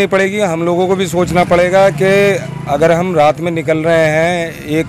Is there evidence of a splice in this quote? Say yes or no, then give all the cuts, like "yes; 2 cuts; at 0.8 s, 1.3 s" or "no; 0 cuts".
no; 0 cuts